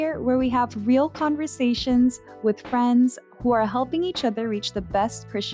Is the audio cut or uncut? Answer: uncut